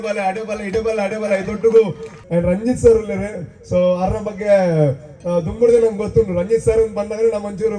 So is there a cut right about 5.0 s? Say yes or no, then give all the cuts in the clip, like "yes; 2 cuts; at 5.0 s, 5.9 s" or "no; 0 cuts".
no; 1 cut; at 2.1 s